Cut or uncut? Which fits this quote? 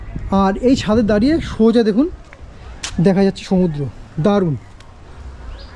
uncut